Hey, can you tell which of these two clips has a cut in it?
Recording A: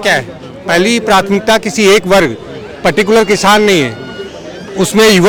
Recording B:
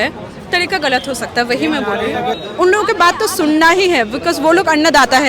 B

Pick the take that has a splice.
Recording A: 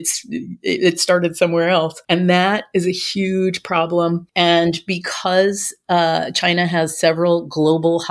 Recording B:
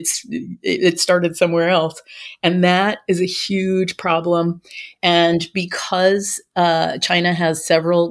A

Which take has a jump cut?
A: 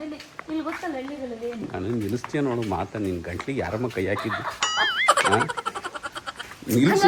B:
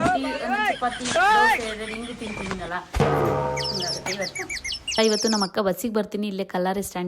B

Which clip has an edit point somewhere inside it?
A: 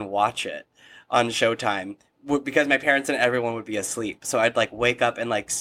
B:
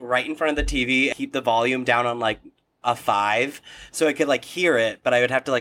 B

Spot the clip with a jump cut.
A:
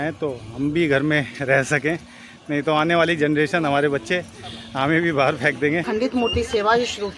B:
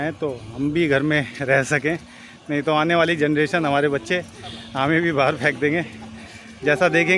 A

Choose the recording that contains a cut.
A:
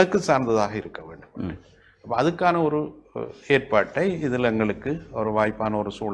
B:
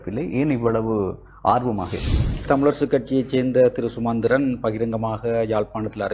B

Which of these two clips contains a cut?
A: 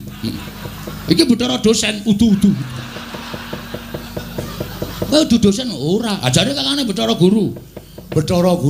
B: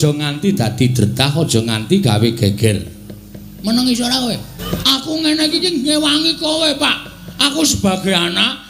B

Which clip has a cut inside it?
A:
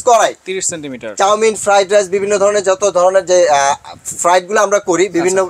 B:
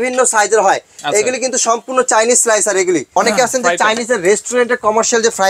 B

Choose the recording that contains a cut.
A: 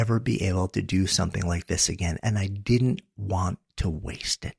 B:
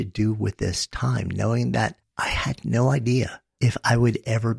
B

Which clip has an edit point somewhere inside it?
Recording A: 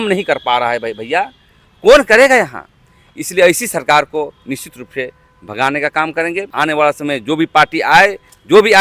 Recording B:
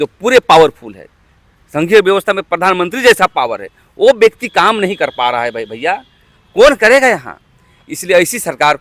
A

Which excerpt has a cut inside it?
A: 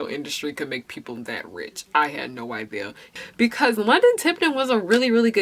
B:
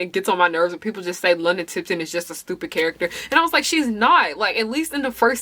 A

